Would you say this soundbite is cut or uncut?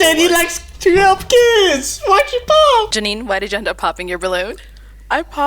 cut